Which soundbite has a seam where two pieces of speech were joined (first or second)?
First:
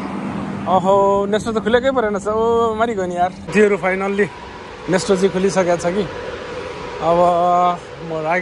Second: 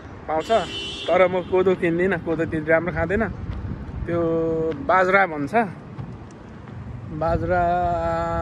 first